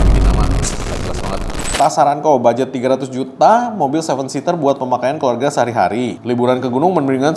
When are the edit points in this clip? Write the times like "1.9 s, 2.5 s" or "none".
1.6 s, 6.2 s